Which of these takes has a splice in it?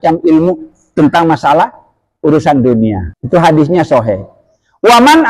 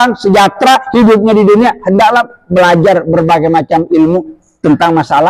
first; 1 cut; at 3.1 s

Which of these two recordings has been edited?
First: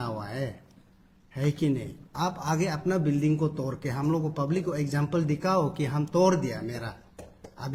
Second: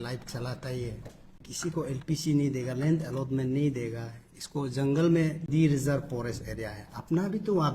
second; 2 cuts; at 1.4 s, 5.5 s

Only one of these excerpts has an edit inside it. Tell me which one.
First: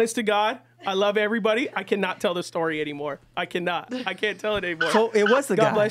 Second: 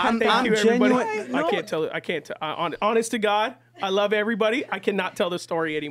second; 1 cut; at 1.3 s

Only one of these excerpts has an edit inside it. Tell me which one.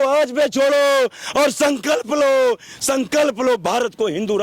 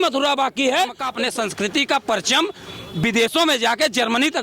second; 1 cut; at 1.0 s

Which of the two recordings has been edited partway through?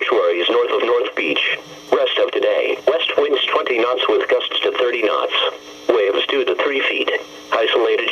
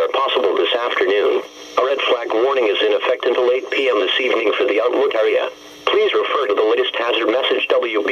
first; 2 cuts; at 5.0 s, 6.2 s

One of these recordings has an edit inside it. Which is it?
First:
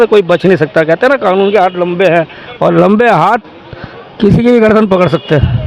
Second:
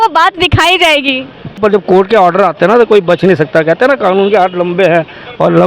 second; 1 cut; at 1.6 s

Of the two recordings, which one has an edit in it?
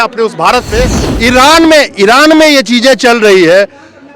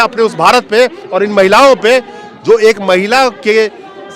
first; 1 cut; at 1.0 s

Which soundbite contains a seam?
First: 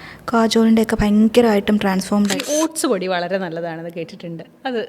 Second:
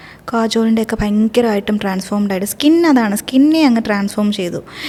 first; 1 cut; at 2.3 s

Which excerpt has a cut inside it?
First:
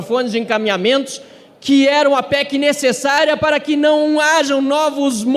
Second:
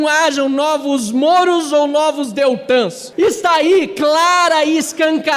second; 1 cut; at 3.0 s

